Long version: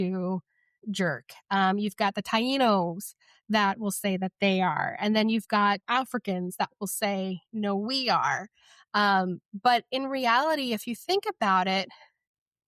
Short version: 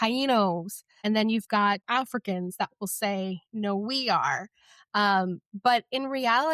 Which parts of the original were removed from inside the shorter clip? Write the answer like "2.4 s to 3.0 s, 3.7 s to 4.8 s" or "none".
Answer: 3.2 s to 4.9 s